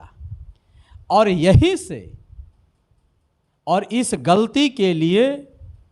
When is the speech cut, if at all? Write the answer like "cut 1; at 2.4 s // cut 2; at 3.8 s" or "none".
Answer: none